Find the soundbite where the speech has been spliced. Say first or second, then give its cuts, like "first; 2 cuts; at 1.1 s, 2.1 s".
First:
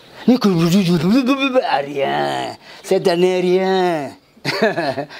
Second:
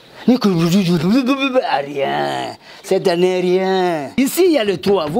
second; 1 cut; at 4.2 s